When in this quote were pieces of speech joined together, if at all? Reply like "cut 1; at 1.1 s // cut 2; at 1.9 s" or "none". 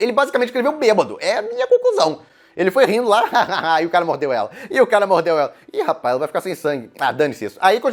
none